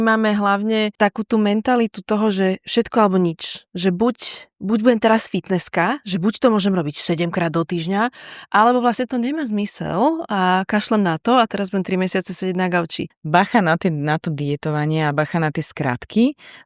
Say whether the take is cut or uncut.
cut